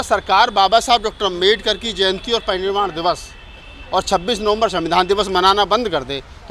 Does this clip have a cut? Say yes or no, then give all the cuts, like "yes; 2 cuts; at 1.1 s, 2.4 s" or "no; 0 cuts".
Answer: no; 0 cuts